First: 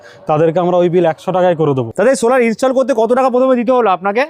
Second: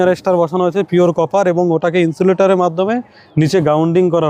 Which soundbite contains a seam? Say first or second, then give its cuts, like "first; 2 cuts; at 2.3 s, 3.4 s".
first; 1 cut; at 1.9 s